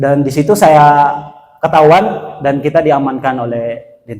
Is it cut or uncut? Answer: uncut